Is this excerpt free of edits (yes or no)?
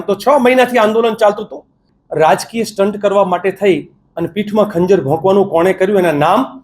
no